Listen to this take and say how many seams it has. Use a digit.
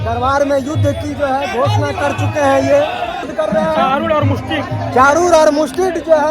1